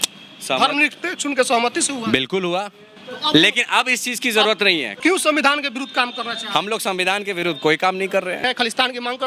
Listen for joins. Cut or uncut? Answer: cut